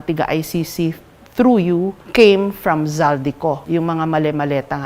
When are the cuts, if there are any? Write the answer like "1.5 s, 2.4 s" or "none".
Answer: 2.0 s, 3.6 s